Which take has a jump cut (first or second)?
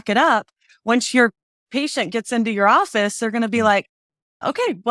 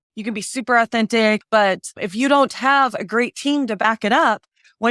second